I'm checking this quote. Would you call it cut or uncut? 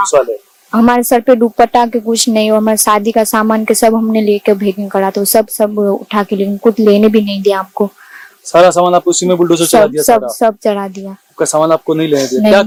uncut